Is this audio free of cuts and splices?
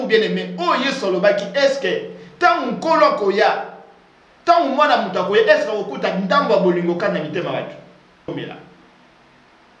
no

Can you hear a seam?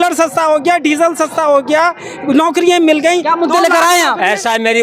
no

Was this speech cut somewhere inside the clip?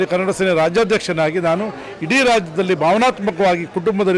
no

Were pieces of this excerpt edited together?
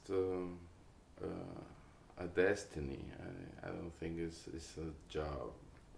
yes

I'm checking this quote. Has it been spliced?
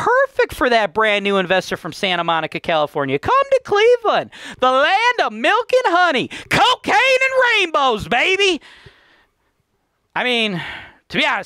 no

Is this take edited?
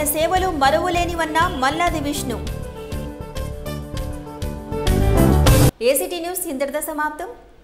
no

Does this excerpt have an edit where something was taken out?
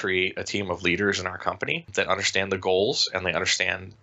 yes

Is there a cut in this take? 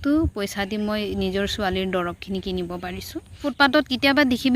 yes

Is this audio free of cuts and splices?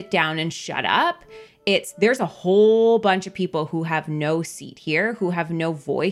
yes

